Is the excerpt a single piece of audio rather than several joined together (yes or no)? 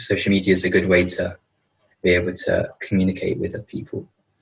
yes